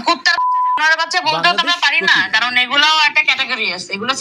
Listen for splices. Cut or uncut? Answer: uncut